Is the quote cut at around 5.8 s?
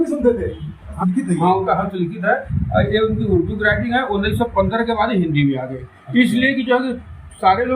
no; 1 cut; at 0.9 s

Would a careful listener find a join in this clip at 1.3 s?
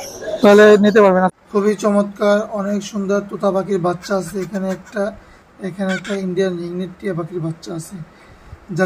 yes; 1 cut; at 1.3 s

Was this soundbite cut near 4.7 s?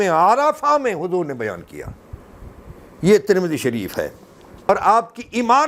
yes; 1 cut; at 4.7 s

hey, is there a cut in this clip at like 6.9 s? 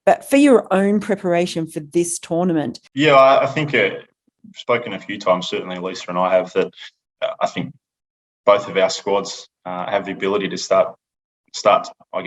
no; 1 cut; at 2.8 s

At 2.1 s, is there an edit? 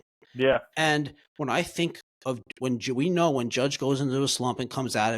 yes; 1 cut; at 2.1 s

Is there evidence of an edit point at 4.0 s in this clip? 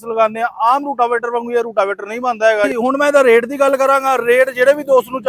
no; 1 cut; at 2.7 s

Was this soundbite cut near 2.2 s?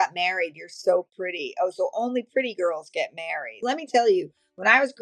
no; 1 cut; at 3.6 s

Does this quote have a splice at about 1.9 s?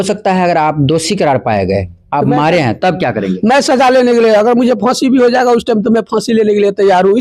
no; 0 cuts

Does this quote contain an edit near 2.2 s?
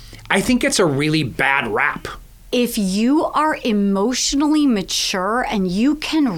yes; 1 cut; at 2.2 s

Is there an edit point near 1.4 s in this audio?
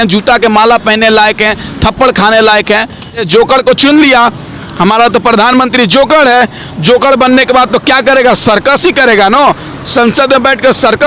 no; 1 cut; at 3.2 s

